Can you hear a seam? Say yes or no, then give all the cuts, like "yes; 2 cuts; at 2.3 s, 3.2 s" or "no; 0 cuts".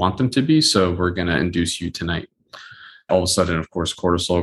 yes; 1 cut; at 3.1 s